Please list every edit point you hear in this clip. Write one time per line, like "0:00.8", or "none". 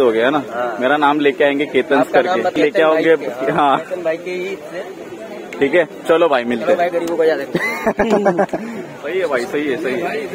0:02.5
0:09.0